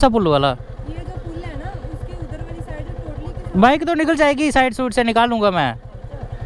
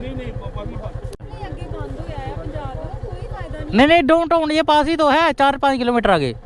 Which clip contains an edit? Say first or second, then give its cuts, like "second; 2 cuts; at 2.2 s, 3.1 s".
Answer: second; 1 cut; at 1.3 s